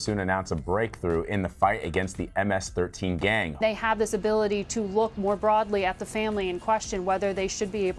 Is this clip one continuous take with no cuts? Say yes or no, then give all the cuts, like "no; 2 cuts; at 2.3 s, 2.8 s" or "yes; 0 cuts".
yes; 0 cuts